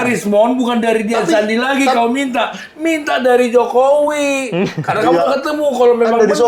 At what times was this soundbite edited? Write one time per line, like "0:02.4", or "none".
none